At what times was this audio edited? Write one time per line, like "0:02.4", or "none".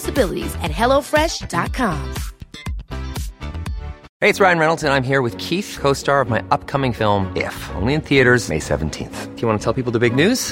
0:04.1

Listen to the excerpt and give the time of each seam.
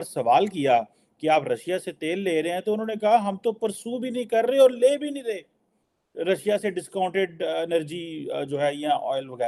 none

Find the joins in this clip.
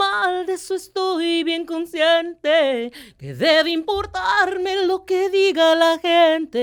none

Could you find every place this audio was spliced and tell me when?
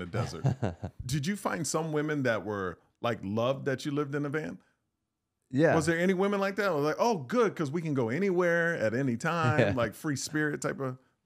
0:01.1

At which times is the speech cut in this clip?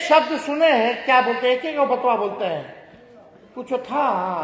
none

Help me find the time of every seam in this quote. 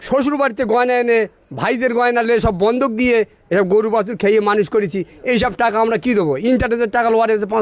none

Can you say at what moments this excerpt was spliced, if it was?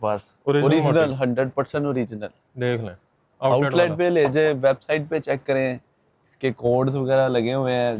none

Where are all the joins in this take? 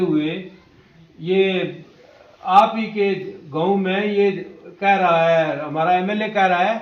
none

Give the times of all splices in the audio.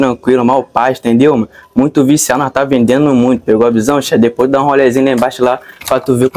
none

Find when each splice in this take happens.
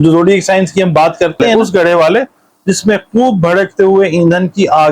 0:01.6

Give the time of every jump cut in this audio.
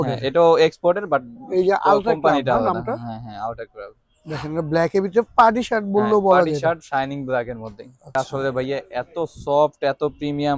0:08.1

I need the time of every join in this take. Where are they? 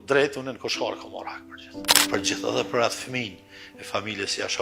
0:01.9

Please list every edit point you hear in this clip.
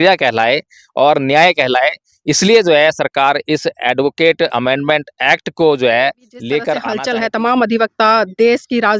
0:06.9

